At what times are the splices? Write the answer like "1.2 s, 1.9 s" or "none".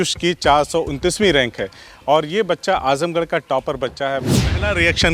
4.2 s